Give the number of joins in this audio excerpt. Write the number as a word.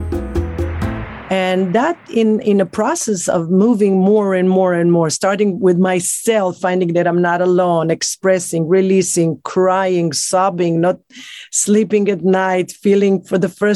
one